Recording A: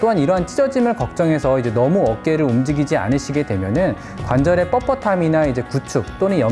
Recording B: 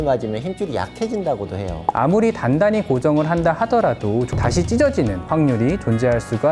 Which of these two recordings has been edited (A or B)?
B